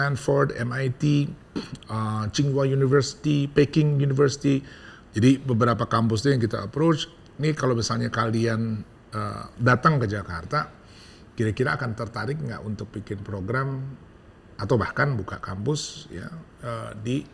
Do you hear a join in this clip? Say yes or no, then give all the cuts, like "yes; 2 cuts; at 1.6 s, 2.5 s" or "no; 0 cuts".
no; 0 cuts